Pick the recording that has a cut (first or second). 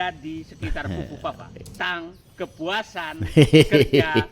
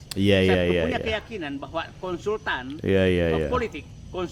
first